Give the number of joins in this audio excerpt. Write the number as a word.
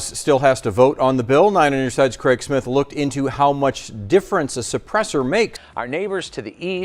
one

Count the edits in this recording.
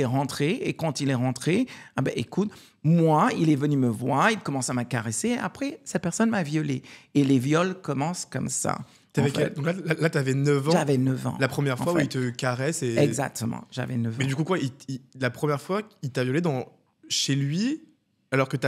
zero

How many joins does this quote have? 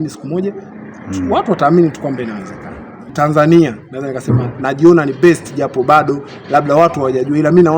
one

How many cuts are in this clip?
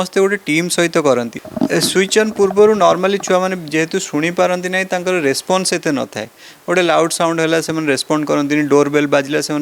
one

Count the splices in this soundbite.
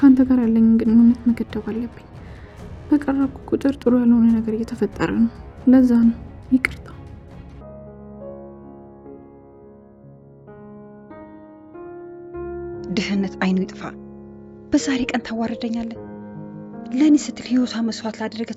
two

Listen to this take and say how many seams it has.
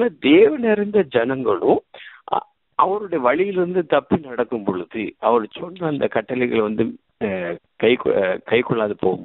zero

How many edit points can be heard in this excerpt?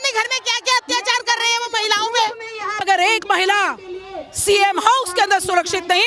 one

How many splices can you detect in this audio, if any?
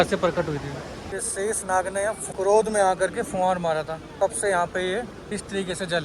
four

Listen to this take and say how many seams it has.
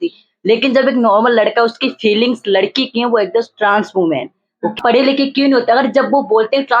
one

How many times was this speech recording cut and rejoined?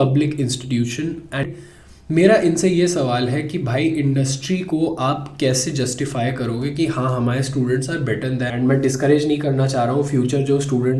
two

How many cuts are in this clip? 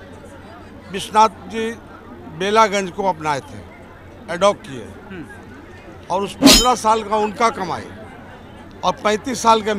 zero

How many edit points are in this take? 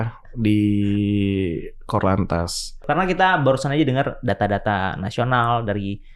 one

